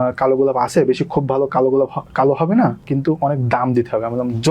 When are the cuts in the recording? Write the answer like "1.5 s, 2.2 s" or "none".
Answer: 2.8 s